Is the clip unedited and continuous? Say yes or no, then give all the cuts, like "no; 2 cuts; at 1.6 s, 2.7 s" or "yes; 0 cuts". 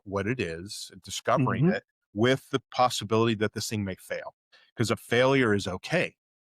no; 1 cut; at 4.6 s